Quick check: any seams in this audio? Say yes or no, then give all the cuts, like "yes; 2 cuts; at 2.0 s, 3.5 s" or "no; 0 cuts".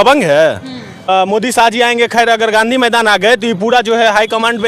yes; 1 cut; at 0.9 s